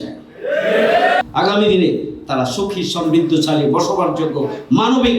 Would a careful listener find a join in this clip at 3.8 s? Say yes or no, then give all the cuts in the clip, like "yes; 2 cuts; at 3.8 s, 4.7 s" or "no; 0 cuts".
no; 1 cut; at 1.2 s